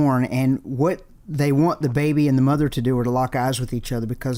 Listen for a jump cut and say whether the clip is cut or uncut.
uncut